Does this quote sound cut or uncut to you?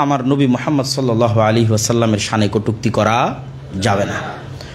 uncut